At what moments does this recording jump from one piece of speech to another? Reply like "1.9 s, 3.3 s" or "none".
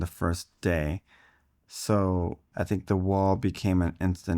2.4 s